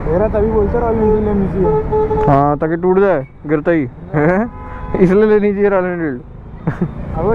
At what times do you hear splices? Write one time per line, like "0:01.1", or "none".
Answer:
none